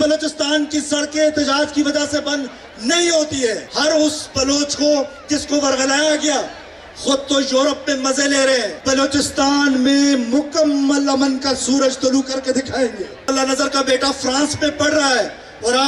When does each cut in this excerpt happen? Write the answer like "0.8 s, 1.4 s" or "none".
3.7 s, 8.7 s, 13.3 s